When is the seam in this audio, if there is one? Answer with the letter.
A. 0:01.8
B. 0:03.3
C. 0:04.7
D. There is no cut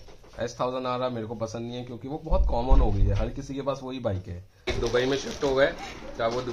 C